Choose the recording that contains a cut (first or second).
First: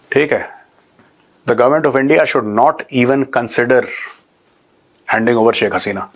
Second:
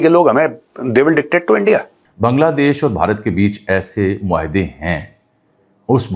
second